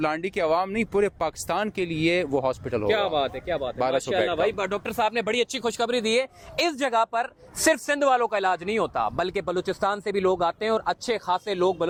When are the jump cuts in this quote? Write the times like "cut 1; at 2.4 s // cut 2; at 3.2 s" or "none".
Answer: none